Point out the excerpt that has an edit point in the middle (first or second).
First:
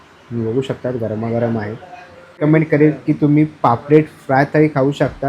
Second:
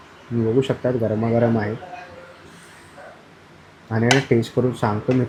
first